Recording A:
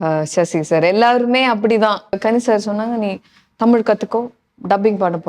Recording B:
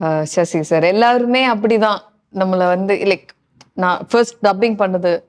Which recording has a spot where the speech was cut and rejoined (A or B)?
A